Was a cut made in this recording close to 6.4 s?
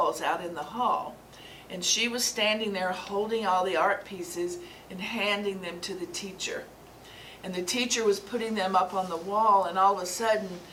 no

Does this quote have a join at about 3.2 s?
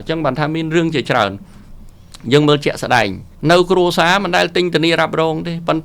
yes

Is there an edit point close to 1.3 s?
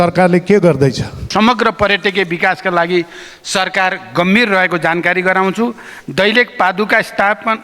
yes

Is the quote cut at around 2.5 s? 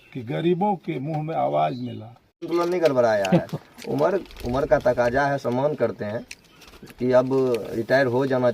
yes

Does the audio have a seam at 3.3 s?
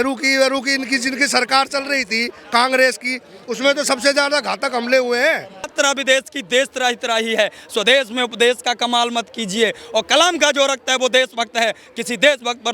no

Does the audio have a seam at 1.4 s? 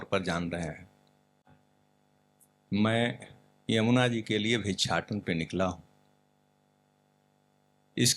no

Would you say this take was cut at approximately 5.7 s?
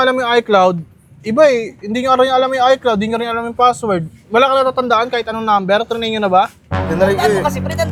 no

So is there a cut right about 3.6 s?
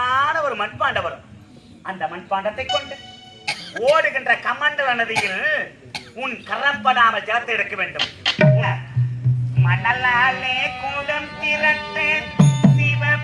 no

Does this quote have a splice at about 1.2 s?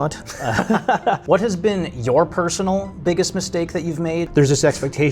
yes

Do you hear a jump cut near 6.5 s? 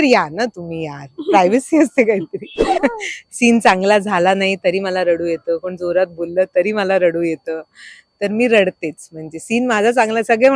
no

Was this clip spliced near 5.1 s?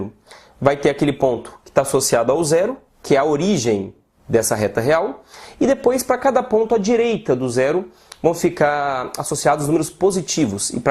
no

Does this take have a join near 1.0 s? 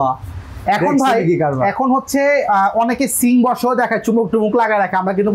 no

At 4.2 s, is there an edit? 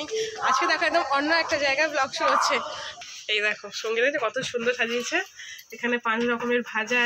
no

